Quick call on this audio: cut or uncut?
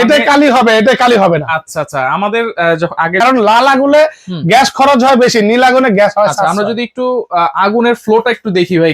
cut